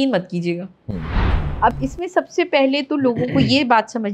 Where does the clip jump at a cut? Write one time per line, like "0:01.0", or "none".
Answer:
0:01.2